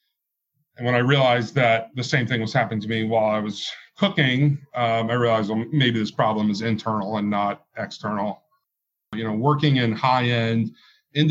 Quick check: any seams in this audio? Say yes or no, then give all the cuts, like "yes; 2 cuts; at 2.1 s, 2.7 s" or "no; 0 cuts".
yes; 1 cut; at 9.0 s